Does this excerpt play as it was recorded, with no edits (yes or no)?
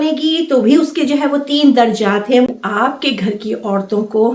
no